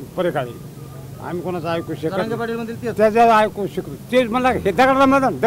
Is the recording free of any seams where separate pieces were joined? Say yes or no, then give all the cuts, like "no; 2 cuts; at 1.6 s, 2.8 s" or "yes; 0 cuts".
yes; 0 cuts